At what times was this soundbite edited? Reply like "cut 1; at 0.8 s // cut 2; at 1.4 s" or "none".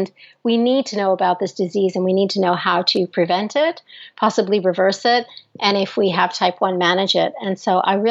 none